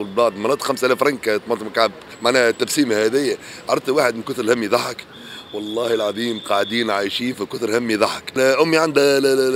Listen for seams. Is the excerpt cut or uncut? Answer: cut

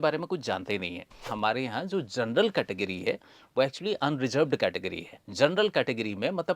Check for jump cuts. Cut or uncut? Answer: cut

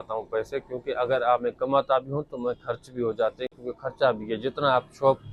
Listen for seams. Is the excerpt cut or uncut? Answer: uncut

